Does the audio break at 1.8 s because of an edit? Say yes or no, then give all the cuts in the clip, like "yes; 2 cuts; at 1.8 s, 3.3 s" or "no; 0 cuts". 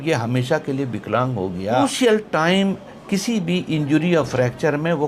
yes; 1 cut; at 1.8 s